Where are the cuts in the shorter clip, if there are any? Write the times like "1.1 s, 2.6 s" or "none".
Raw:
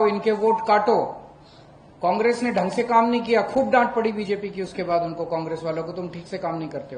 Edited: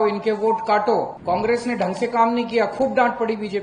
1.1 s